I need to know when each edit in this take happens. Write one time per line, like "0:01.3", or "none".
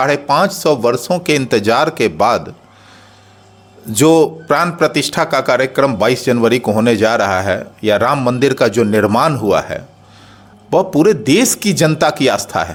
none

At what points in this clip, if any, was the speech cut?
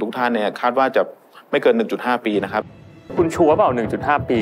0:03.1

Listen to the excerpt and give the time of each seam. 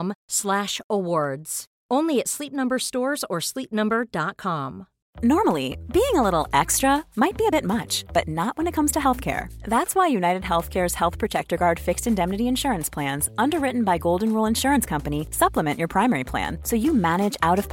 none

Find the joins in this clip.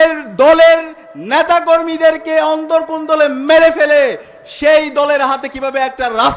none

